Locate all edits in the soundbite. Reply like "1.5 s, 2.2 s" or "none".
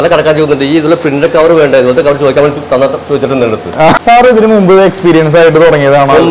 4.0 s